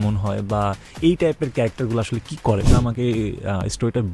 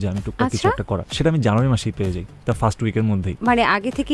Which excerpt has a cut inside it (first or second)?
first